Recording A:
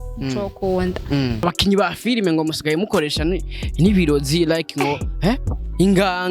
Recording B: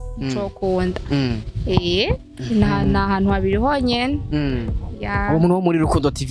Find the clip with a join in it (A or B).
A